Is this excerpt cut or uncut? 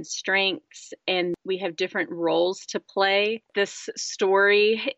cut